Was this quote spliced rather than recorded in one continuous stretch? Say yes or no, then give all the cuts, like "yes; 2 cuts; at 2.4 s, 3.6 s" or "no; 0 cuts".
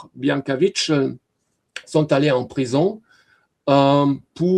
no; 0 cuts